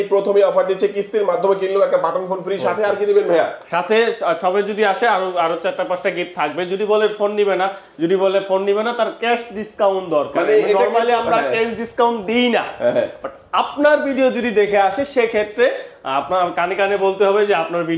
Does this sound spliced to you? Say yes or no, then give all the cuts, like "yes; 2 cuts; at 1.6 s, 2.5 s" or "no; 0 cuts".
no; 0 cuts